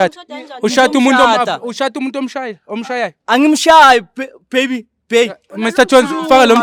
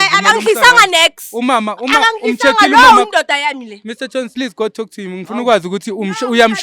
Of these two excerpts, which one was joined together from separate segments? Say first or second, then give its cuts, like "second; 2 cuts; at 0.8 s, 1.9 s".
second; 1 cut; at 4.3 s